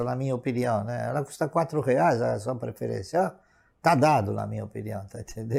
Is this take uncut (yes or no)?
yes